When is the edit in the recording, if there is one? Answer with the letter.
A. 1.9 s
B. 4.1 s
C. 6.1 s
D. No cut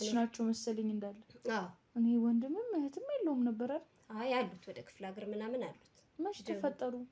D